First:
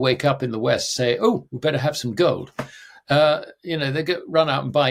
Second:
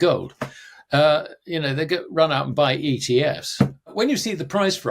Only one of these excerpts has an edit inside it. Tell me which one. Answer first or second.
second